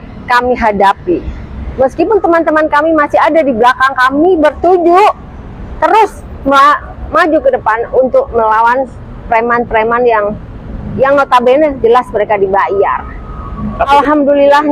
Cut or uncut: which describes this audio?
uncut